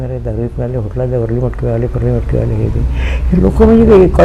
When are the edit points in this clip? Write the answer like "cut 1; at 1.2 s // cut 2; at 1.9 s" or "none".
none